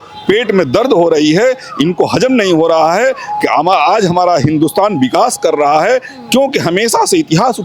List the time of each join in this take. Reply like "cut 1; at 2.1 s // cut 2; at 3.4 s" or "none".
none